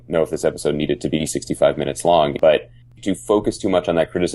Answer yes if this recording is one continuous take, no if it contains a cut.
no